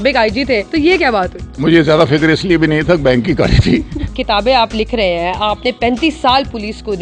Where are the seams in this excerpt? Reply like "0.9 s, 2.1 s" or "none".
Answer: 1.5 s, 4.0 s